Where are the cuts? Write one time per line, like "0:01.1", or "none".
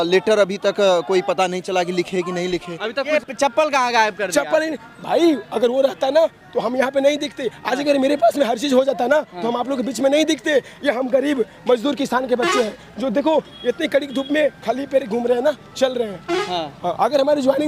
0:03.1